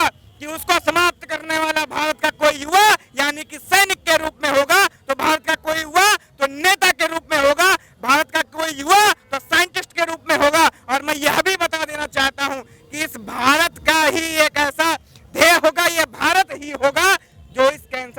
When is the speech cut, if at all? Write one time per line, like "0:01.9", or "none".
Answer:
none